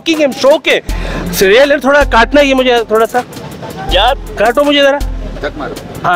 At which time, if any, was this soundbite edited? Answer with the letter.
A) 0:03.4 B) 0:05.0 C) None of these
C